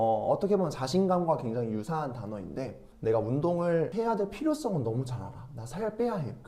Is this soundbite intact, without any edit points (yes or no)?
no